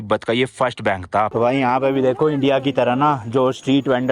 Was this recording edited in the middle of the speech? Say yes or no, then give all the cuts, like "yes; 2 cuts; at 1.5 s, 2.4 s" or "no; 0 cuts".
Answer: yes; 1 cut; at 1.3 s